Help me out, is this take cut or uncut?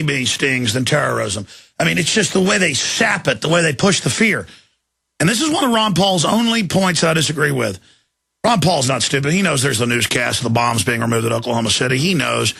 cut